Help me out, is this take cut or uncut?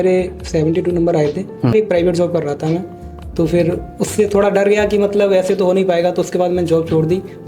cut